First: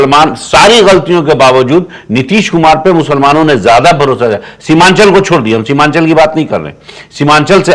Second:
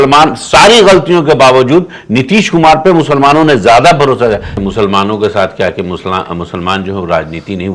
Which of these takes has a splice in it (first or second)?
second